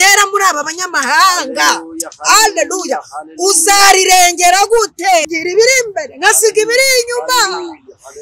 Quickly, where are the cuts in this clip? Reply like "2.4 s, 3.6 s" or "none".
5.2 s